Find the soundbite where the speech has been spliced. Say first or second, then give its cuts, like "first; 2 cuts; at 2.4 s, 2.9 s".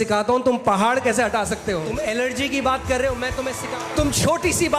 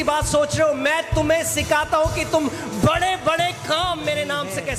first; 2 cuts; at 1.9 s, 3.6 s